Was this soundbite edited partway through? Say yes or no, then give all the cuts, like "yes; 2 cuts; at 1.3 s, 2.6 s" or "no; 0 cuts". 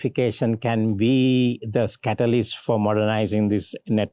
no; 0 cuts